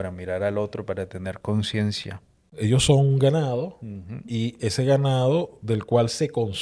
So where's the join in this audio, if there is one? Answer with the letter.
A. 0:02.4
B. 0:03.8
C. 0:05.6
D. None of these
A